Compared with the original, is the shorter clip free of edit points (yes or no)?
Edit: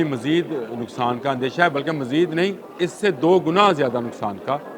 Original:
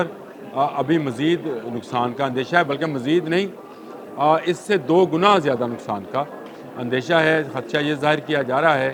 no